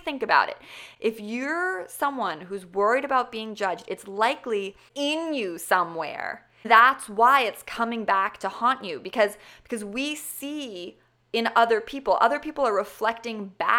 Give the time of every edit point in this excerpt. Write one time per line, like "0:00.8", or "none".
0:04.9
0:06.6